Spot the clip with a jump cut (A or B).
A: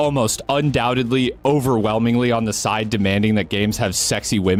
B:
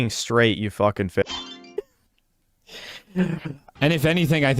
B